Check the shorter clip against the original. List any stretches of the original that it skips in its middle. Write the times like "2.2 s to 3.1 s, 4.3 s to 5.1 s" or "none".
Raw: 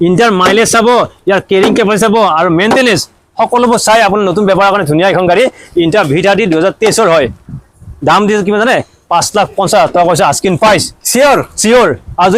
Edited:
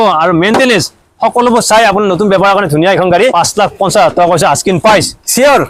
5.5 s to 9.1 s

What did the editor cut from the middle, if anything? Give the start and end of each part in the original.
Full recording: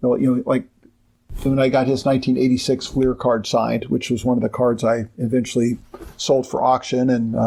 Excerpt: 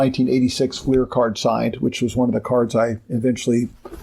none

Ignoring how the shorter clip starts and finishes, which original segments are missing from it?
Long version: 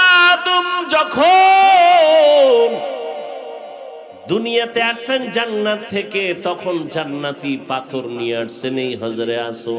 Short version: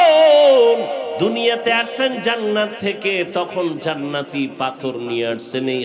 3.1 s to 4.2 s

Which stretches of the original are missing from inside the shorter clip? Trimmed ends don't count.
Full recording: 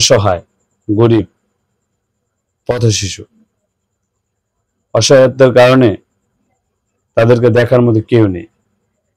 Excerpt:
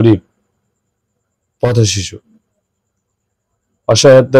none

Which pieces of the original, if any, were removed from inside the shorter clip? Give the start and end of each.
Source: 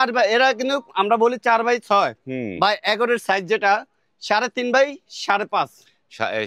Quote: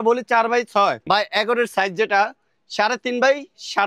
2.2 s to 2.5 s

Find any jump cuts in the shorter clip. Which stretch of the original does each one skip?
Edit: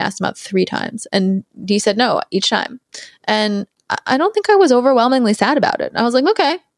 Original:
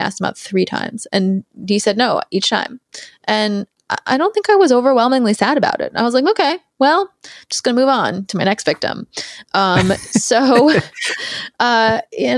none

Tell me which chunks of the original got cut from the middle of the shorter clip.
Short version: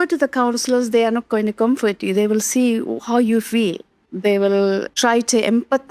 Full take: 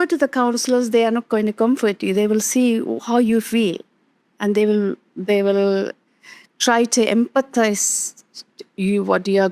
4.0 s to 5.1 s, 5.9 s to 6.5 s

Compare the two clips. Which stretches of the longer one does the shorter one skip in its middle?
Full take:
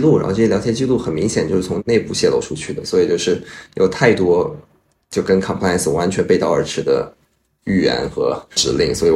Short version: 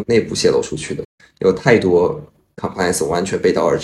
2.9 s to 3.4 s, 5.0 s to 5.5 s

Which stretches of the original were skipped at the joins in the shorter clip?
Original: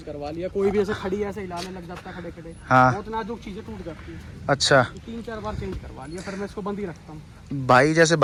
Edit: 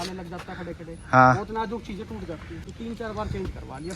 4.3 s to 5.0 s

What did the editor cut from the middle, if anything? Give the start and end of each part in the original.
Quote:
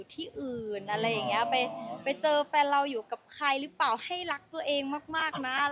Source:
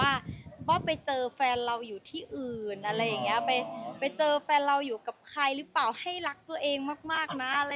none

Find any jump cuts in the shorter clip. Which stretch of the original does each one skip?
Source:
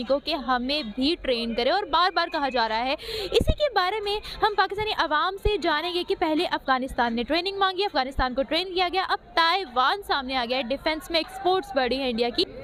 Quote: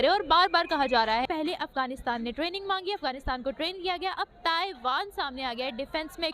2.9 s to 6.2 s

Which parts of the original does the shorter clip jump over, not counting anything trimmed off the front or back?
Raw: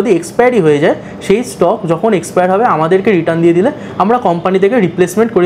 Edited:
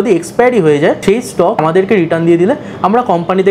1.6 s to 2.7 s

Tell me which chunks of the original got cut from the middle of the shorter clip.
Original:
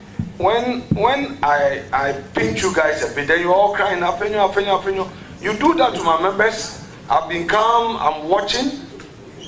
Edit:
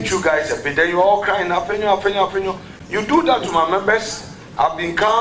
none

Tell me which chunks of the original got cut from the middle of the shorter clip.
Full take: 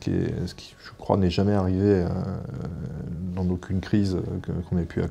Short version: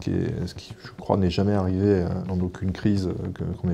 2.2 s to 3.3 s

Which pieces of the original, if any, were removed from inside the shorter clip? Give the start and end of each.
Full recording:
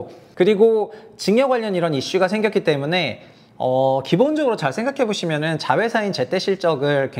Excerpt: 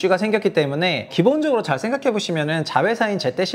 3.2 s to 4.0 s

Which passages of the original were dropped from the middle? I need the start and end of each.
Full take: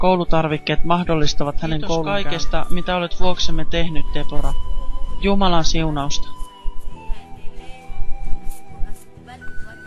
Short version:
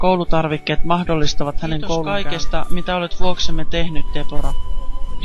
none

